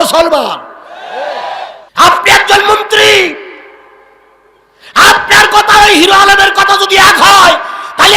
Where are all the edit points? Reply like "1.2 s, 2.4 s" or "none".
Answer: 1.8 s